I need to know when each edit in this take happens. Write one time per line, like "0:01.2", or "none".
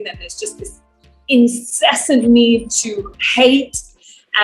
none